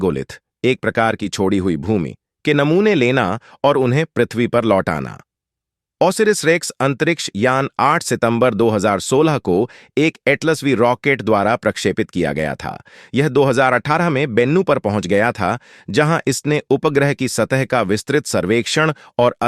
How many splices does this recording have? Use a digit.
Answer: 1